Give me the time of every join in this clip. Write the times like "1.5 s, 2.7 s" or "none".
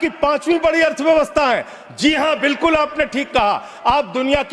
none